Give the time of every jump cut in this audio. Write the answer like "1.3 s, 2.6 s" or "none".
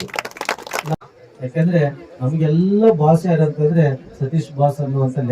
0.9 s